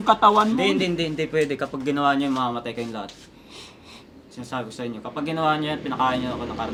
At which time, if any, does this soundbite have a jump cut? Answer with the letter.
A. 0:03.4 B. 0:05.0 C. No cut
C